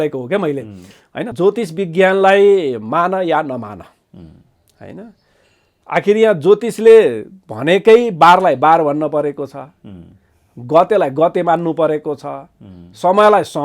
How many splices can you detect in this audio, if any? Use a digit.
1